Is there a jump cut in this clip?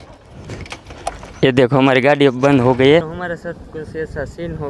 yes; 1 cut; at 3.0 s

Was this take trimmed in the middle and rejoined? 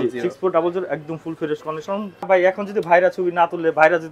yes; 1 cut; at 2.3 s

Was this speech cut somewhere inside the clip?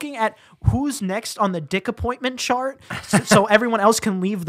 no; 0 cuts

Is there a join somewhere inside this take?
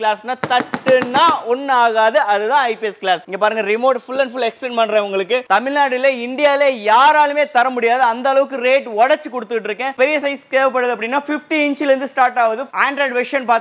yes; 4 cuts; at 3.3 s, 5.4 s, 9.9 s, 12.7 s

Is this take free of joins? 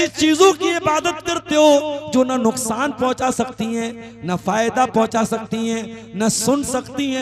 yes; 0 cuts

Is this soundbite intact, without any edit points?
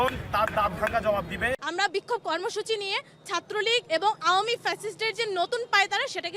no; 1 cut; at 1.6 s

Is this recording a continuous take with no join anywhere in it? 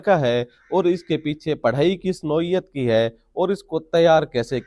yes; 0 cuts

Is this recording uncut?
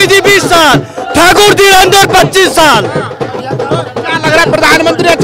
yes; 0 cuts

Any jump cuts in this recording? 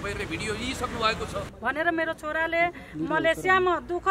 yes; 1 cut; at 1.5 s

